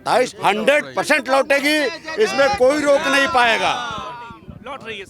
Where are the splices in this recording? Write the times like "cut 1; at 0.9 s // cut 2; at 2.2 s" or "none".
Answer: none